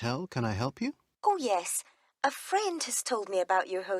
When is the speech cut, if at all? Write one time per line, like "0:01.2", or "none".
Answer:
0:01.1

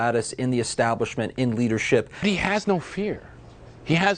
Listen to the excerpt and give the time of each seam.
0:02.2

